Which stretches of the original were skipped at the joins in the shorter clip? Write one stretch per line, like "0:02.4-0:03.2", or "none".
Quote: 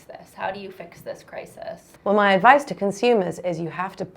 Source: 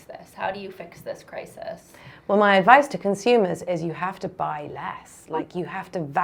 0:01.9-0:02.1